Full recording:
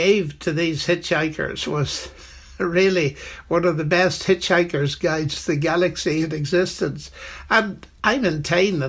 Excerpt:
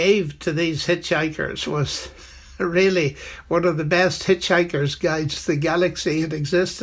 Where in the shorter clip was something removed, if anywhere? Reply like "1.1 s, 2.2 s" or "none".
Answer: none